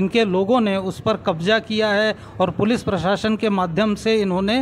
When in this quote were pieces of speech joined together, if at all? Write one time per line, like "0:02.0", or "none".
none